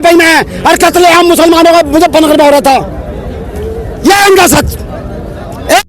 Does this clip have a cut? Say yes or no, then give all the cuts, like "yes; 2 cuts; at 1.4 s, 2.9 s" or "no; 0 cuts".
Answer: no; 0 cuts